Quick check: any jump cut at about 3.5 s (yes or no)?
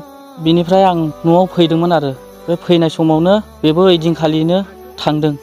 yes